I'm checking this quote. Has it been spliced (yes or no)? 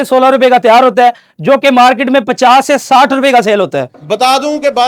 yes